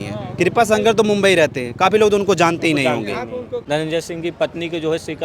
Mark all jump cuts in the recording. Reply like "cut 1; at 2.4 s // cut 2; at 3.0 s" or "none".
cut 1; at 3.5 s

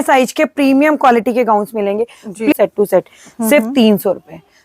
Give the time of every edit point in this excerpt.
cut 1; at 2.5 s

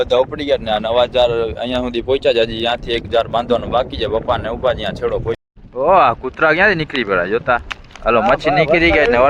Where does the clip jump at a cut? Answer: cut 1; at 5.4 s

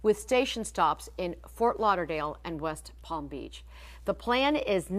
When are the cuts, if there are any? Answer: cut 1; at 2.8 s

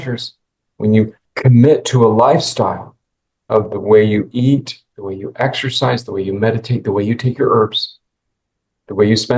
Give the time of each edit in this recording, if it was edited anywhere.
cut 1; at 1.2 s

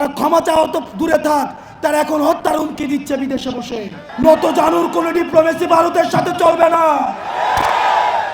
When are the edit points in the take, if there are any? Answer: cut 1; at 4.0 s

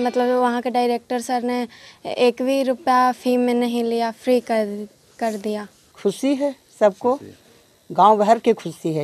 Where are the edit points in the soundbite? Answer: cut 1; at 5.8 s

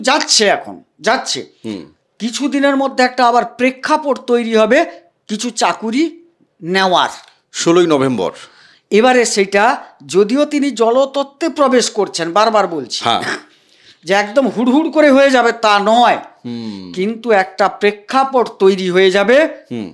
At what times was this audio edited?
none

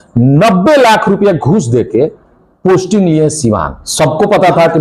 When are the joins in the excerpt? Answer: cut 1; at 3.8 s

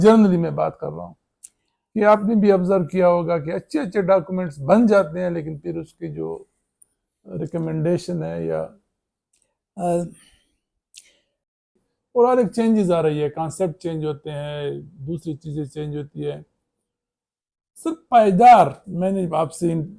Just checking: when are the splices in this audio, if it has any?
cut 1; at 11.6 s

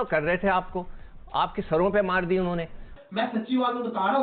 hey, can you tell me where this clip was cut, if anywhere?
cut 1; at 2.8 s

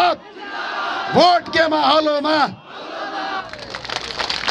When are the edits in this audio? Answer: cut 1; at 3.4 s

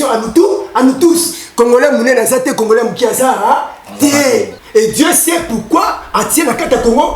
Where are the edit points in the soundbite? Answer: cut 1; at 4.6 s

